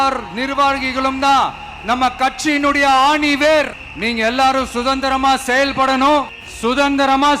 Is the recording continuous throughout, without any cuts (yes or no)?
no